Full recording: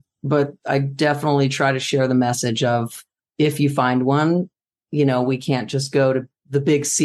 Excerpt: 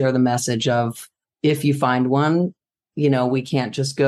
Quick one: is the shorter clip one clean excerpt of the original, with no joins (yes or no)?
yes